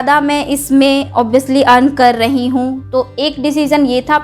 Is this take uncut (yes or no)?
yes